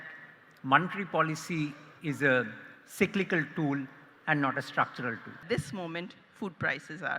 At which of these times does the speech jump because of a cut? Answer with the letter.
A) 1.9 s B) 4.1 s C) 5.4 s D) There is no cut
C